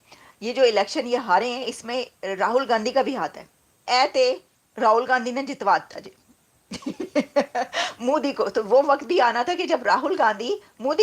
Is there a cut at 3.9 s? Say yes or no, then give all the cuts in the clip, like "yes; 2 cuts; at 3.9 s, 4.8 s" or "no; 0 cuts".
yes; 1 cut; at 3.9 s